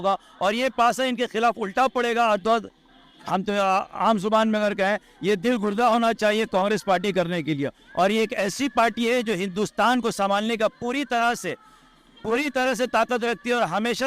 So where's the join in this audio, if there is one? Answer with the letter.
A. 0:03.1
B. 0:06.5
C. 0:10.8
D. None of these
A